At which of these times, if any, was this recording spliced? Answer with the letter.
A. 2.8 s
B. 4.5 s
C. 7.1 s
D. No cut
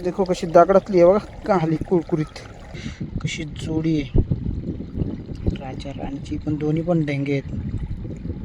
A